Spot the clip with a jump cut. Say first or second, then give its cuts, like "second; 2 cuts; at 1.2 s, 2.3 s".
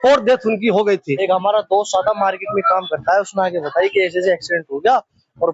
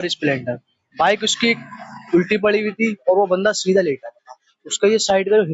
first; 1 cut; at 1.1 s